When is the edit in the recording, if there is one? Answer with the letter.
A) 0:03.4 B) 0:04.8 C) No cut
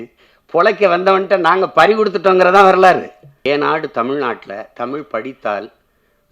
A